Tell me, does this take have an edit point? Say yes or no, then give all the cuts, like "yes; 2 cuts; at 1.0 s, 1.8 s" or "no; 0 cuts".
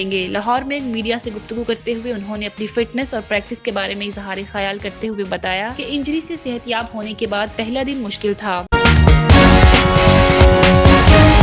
yes; 1 cut; at 8.6 s